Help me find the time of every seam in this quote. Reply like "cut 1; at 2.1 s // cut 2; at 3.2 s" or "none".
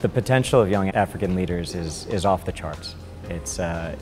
cut 1; at 0.9 s